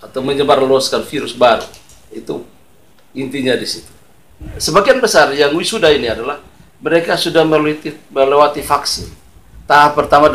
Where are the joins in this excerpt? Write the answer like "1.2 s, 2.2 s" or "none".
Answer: 4.5 s